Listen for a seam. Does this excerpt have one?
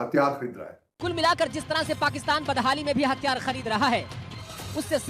yes; 1 cut; at 0.9 s

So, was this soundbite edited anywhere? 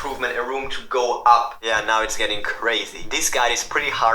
yes; 2 cuts; at 1.6 s, 3.0 s

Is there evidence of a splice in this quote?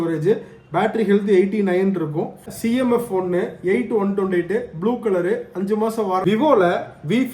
yes; 2 cuts; at 2.4 s, 6.2 s

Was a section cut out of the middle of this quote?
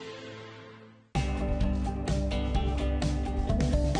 yes; 1 cut; at 1.0 s

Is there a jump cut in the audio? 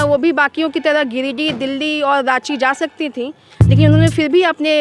no; 0 cuts

